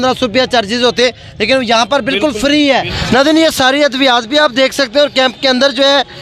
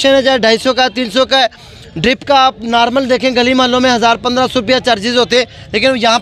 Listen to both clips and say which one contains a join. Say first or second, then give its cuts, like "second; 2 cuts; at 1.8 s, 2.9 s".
first; 1 cut; at 2.9 s